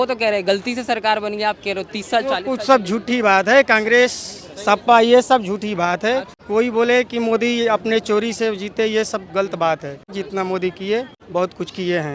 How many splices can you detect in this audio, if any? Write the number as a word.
three